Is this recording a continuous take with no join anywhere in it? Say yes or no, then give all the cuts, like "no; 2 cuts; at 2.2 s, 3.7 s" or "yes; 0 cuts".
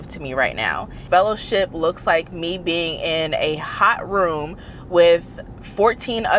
no; 1 cut; at 1.0 s